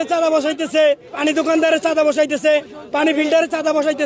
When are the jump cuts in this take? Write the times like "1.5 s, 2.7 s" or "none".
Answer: 1.1 s